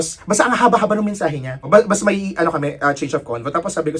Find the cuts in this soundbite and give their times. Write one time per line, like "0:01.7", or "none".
0:01.6